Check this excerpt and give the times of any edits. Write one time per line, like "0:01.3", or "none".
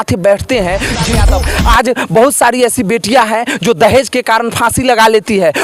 0:01.3